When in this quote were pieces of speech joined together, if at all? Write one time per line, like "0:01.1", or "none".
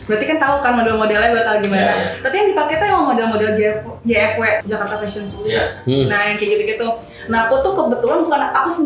0:04.6